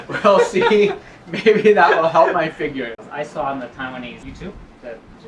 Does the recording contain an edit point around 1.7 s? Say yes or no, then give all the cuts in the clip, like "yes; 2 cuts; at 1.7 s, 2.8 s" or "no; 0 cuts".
no; 2 cuts; at 3.0 s, 4.2 s